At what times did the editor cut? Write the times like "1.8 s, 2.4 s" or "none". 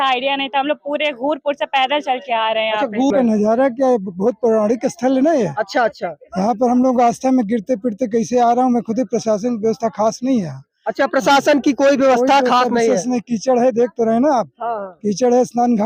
3.1 s

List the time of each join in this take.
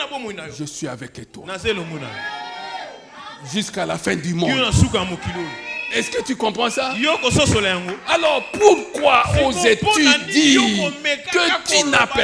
none

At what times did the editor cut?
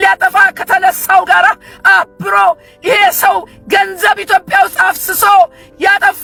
none

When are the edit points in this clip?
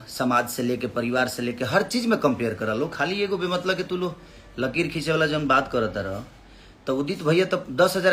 none

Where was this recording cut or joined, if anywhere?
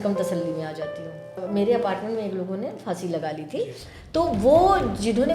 1.4 s

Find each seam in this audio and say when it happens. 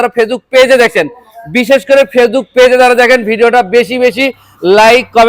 none

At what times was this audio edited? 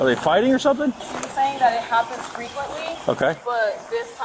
1.1 s

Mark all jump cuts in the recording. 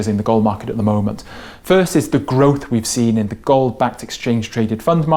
none

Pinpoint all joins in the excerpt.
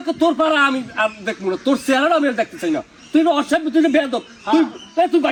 none

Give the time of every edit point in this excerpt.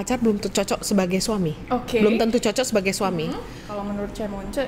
3.7 s

